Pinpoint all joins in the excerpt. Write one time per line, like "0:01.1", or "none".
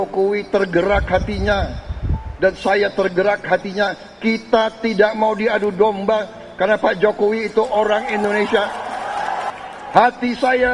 0:09.5